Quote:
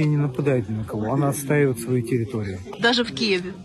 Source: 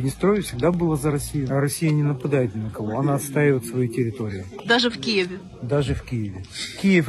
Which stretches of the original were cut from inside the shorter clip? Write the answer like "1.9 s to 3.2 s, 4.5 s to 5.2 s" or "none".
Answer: none